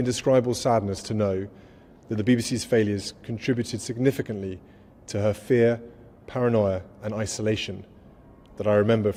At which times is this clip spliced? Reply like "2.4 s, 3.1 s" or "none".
none